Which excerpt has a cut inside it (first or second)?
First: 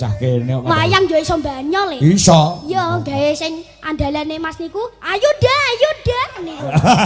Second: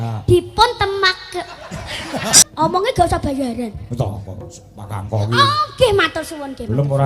second